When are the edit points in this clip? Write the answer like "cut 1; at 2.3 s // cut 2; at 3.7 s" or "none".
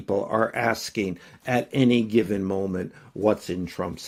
none